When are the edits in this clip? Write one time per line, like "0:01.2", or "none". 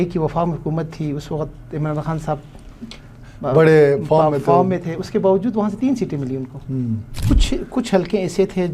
0:07.1